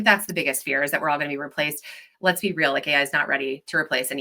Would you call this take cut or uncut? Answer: uncut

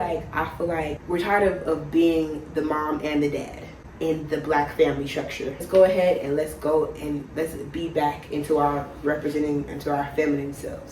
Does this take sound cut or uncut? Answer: cut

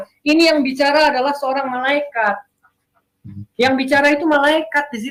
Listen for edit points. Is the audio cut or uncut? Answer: uncut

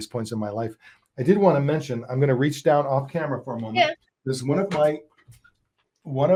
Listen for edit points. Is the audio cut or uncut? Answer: uncut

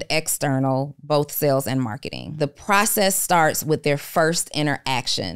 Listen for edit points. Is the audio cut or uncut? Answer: cut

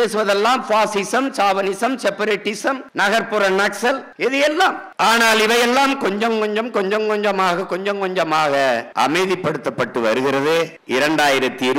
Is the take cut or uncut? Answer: uncut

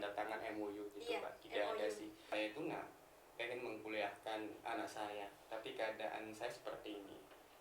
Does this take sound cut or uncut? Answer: cut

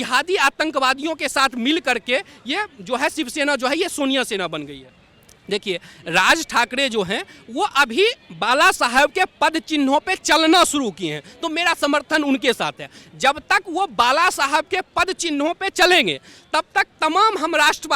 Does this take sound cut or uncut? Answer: uncut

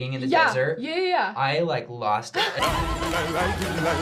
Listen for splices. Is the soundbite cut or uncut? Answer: uncut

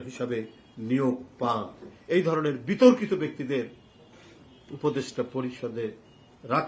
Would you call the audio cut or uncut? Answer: cut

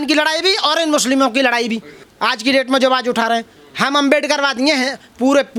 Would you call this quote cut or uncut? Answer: uncut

